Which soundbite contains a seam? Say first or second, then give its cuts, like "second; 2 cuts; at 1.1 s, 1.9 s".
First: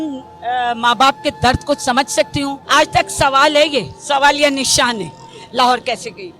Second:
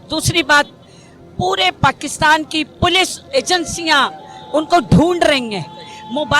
first; 1 cut; at 2.6 s